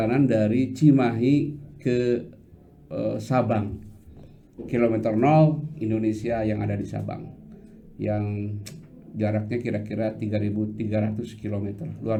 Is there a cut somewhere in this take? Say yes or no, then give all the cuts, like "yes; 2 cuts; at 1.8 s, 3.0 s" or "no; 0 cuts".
no; 0 cuts